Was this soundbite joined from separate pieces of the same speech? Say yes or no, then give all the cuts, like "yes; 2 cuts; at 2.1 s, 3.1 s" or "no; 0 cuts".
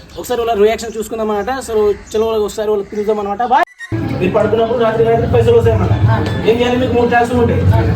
yes; 1 cut; at 3.4 s